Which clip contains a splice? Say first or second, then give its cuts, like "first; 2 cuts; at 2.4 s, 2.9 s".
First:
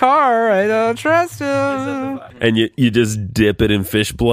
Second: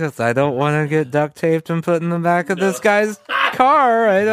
first; 1 cut; at 2.0 s